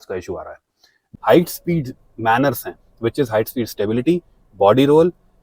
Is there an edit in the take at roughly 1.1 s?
yes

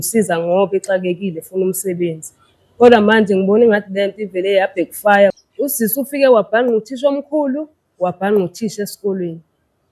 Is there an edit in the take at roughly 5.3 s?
yes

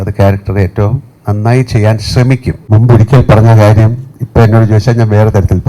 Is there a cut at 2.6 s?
yes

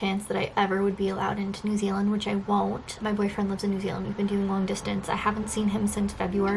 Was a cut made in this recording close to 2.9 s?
yes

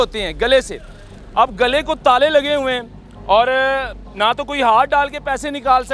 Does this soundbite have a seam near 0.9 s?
yes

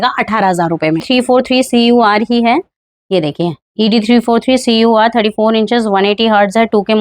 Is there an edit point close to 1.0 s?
yes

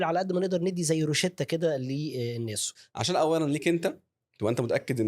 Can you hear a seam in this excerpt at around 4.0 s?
no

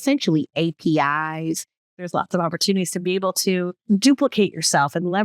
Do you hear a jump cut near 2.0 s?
yes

